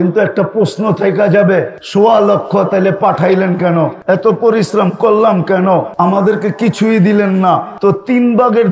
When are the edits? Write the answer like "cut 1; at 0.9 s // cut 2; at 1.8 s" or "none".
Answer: cut 1; at 1.8 s // cut 2; at 4.0 s // cut 3; at 5.9 s // cut 4; at 7.7 s